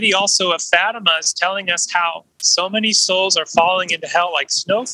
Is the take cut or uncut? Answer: cut